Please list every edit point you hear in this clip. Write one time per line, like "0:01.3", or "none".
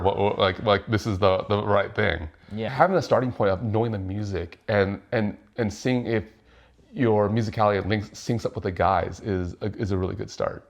0:02.7